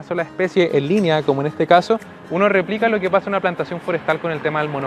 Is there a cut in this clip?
no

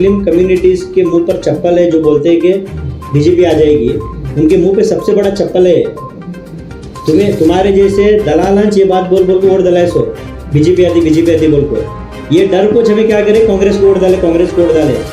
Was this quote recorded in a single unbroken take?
yes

